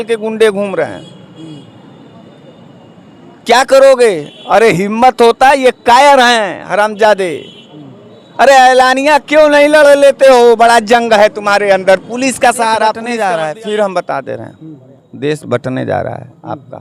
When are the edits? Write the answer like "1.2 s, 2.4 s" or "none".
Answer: 13.1 s